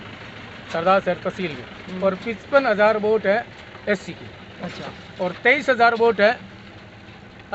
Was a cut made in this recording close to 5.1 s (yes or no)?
no